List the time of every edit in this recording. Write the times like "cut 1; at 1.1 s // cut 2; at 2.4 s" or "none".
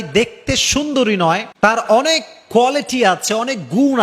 cut 1; at 1.5 s

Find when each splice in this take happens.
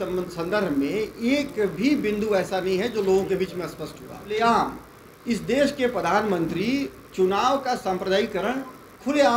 cut 1; at 4.3 s

